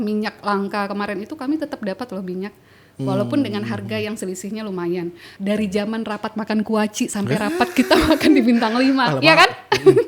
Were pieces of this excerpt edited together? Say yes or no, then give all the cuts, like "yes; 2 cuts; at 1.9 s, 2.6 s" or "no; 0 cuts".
yes; 1 cut; at 5.3 s